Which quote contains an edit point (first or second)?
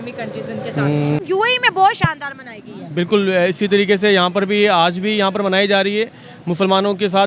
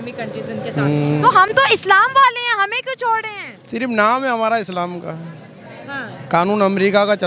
first